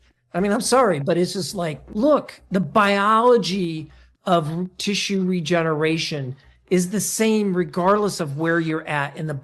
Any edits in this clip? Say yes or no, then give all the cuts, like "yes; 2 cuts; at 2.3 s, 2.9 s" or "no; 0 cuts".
no; 0 cuts